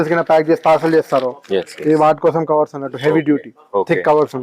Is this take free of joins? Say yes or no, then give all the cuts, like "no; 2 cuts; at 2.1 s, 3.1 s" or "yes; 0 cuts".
yes; 0 cuts